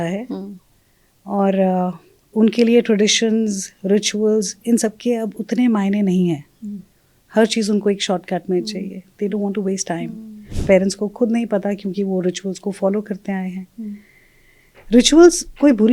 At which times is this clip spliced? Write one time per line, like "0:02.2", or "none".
0:10.5